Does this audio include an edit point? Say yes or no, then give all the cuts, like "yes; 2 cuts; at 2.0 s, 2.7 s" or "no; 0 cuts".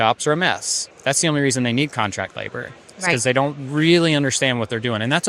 yes; 1 cut; at 0.9 s